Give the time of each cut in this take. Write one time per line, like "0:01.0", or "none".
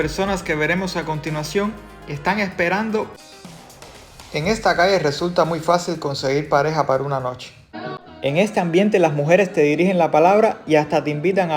0:03.1
0:07.8